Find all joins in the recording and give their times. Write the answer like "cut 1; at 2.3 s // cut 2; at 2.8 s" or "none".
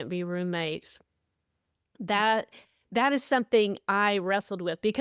none